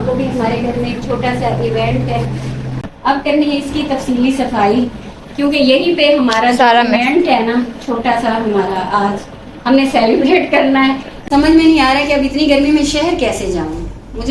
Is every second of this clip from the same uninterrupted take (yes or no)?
no